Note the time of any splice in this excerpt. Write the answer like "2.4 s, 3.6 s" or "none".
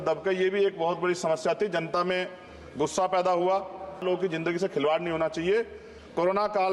4.0 s